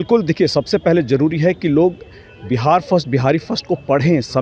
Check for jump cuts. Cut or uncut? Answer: uncut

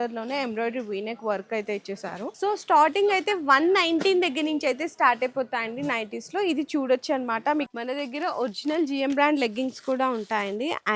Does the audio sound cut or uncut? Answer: cut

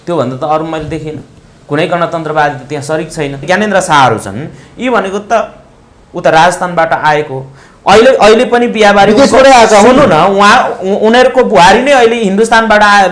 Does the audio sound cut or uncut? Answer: cut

